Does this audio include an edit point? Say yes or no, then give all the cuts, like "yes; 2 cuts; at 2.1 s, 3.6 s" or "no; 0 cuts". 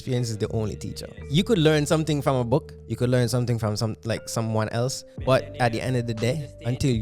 yes; 2 cuts; at 1.2 s, 2.8 s